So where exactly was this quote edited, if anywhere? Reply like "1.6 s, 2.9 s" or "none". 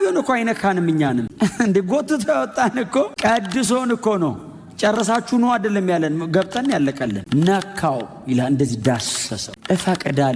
none